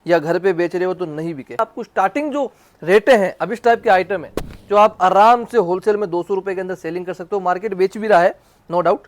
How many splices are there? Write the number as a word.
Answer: one